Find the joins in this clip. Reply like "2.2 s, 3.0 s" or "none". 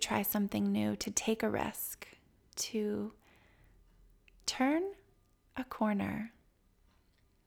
none